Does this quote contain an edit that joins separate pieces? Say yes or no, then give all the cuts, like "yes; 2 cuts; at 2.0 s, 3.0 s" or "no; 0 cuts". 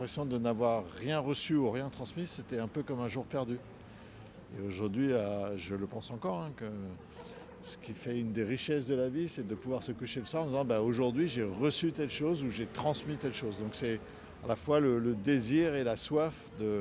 no; 0 cuts